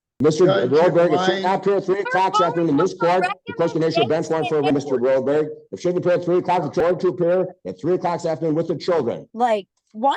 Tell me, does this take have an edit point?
yes; 1 cut; at 9.3 s

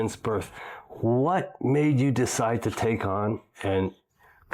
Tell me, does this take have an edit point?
no; 0 cuts

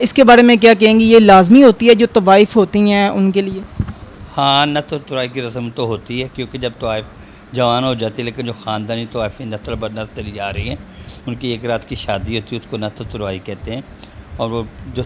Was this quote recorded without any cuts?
yes; 0 cuts

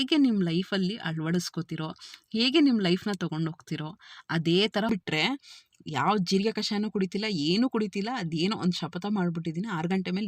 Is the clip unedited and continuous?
no; 1 cut; at 4.9 s

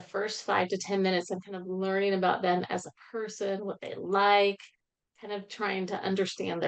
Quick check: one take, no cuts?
yes; 0 cuts

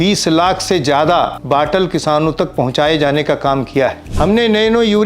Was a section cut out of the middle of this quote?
yes; 2 cuts; at 1.4 s, 4.0 s

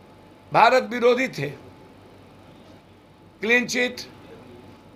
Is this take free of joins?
yes; 0 cuts

